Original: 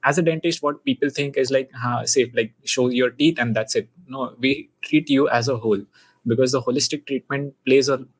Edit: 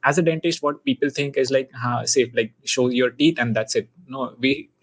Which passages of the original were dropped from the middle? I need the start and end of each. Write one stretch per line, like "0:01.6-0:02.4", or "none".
none